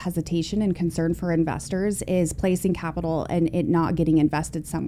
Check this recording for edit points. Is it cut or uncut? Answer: uncut